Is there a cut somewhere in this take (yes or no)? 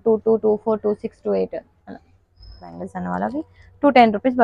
yes